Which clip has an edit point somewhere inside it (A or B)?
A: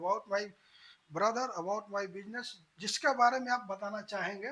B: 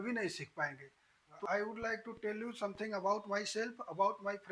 B